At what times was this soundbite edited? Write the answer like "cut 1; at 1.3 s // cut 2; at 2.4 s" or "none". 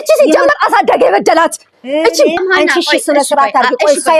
cut 1; at 2.4 s